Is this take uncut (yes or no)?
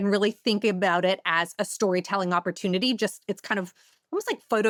yes